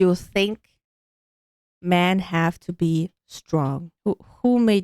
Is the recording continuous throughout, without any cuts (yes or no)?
no